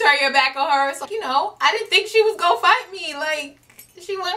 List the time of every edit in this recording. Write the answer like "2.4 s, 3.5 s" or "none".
1.1 s